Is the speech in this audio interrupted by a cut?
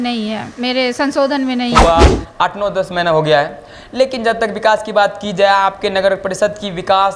yes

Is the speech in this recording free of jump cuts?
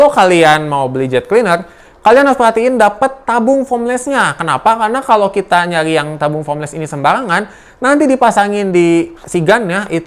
yes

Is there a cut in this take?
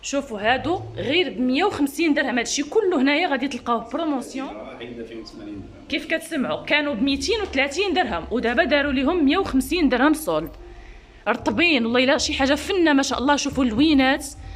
yes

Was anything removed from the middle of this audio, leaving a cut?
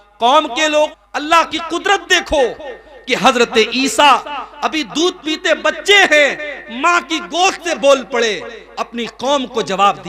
yes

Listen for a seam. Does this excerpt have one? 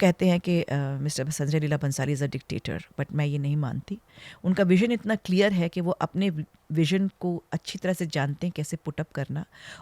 no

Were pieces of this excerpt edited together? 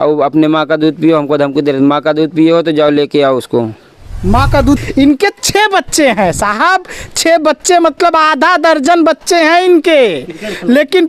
yes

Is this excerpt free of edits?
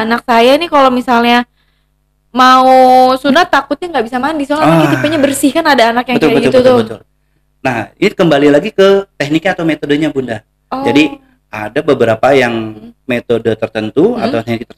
yes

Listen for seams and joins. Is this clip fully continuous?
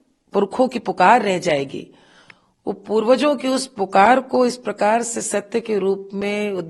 yes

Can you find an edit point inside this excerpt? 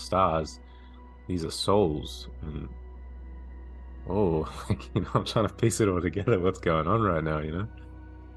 no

